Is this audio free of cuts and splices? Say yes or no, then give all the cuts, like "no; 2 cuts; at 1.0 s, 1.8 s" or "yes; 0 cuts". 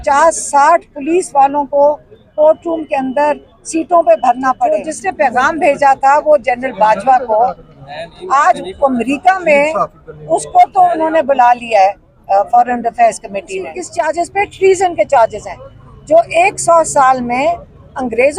no; 2 cuts; at 4.9 s, 13.8 s